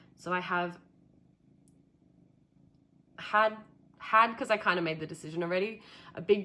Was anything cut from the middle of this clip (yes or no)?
no